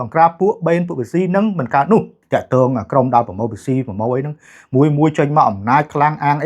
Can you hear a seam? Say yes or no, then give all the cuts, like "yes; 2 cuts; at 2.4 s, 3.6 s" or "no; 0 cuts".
yes; 1 cut; at 2.2 s